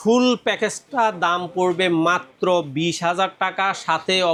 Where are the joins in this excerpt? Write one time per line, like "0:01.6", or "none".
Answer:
none